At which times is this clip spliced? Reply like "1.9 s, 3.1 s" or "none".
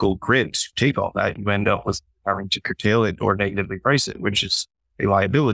none